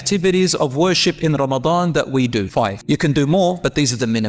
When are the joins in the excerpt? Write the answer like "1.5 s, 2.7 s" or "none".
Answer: 2.8 s